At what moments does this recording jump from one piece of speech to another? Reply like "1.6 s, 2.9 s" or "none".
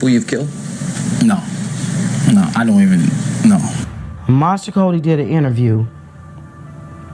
3.8 s